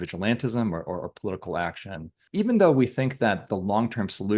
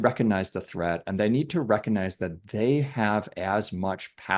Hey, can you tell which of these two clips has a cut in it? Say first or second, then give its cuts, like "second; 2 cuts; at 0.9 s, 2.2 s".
first; 1 cut; at 2.2 s